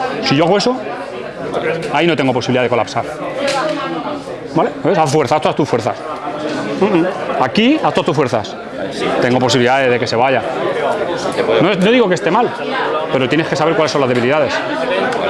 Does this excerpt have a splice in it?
no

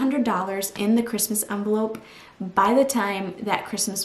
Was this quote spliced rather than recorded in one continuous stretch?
no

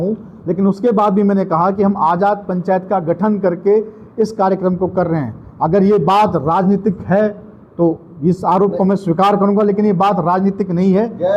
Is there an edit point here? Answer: no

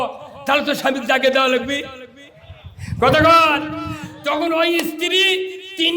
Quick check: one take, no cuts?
yes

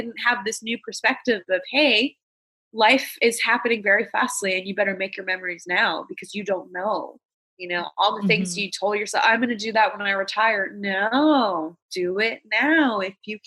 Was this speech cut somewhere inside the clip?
no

